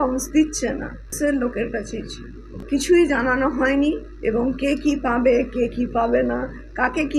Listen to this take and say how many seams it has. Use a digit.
2